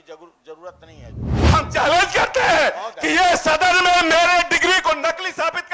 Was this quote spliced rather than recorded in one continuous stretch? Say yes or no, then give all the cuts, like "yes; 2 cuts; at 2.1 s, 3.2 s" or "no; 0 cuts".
yes; 1 cut; at 1.3 s